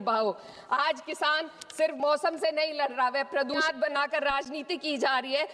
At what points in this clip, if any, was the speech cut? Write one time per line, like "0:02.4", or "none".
0:03.6

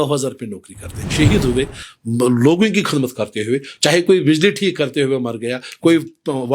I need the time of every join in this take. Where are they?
0:01.1

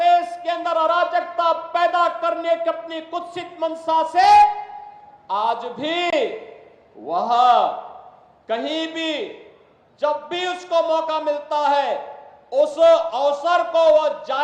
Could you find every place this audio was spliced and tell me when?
none

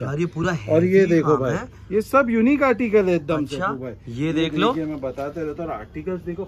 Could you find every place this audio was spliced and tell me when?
none

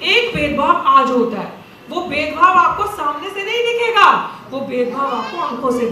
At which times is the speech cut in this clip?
none

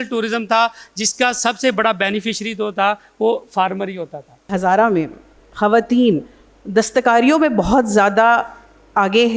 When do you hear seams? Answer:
0:04.5

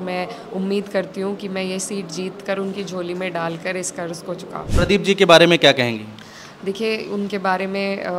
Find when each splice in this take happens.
0:04.7

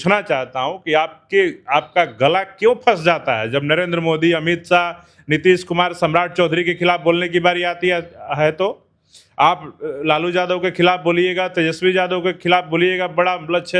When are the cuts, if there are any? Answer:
none

